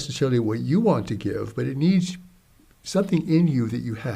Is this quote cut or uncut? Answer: uncut